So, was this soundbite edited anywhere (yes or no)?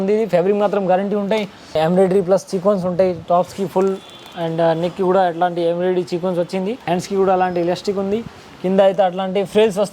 yes